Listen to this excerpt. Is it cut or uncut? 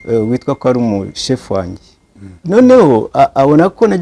cut